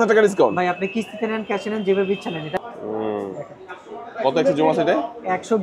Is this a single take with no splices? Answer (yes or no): no